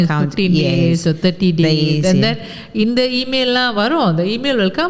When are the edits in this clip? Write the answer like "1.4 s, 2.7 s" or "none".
none